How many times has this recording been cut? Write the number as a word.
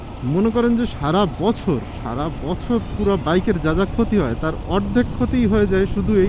zero